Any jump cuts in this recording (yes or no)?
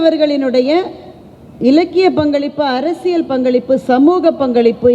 no